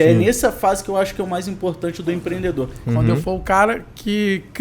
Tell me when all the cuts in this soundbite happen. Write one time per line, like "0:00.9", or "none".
0:02.7